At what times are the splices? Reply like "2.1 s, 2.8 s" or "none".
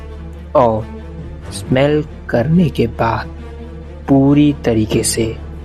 none